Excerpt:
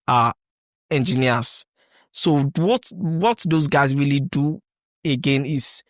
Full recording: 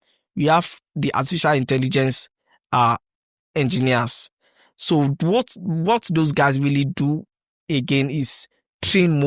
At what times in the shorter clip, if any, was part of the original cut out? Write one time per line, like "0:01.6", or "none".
none